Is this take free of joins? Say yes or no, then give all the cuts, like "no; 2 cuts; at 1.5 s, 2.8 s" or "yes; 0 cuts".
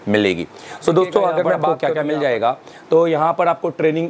no; 1 cut; at 1.8 s